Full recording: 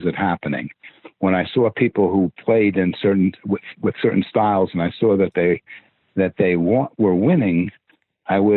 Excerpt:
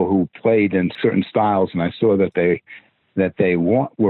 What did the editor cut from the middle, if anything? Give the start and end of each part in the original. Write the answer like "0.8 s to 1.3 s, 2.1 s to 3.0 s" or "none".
3.0 s to 4.0 s